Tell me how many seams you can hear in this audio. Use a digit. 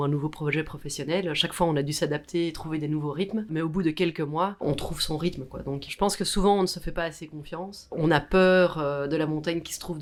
0